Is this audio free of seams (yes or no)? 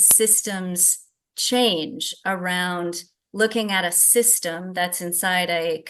yes